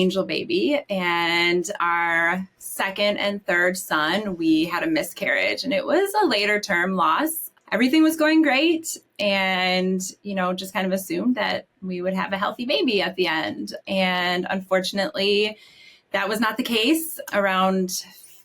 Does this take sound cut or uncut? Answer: cut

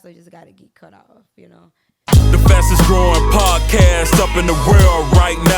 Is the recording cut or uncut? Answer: cut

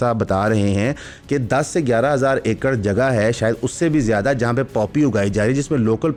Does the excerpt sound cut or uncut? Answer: uncut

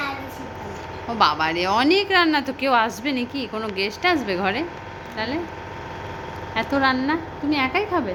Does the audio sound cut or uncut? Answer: uncut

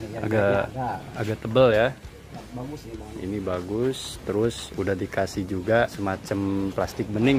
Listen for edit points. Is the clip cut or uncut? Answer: cut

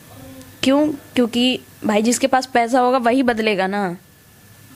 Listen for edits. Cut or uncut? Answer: uncut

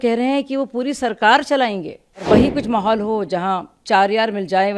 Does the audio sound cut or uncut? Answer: cut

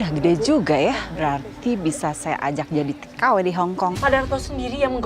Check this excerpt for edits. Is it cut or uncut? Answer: cut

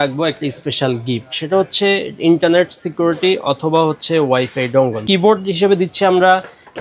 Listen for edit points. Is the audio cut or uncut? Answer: cut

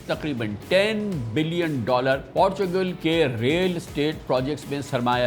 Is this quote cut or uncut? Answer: cut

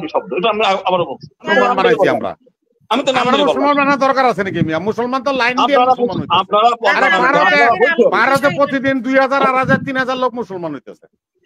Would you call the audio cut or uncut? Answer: cut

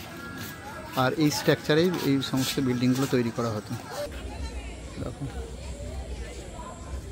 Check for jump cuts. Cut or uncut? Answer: cut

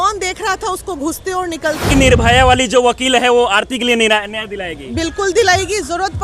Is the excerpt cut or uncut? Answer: cut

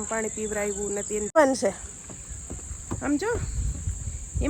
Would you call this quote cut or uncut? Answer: cut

